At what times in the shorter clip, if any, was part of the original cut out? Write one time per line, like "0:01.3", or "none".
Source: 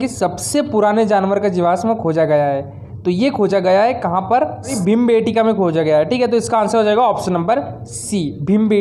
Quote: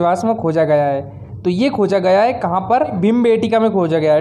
0:02.9